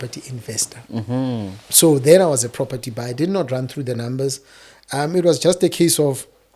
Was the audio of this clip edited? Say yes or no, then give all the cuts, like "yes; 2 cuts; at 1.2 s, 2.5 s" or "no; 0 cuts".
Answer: no; 0 cuts